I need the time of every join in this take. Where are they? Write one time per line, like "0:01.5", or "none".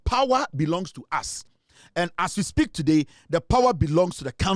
none